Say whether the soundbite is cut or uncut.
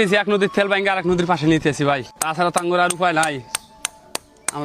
cut